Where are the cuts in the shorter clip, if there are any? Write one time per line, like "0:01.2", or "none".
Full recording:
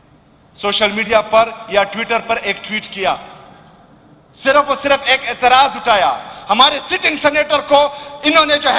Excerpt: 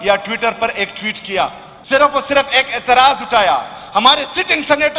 0:01.7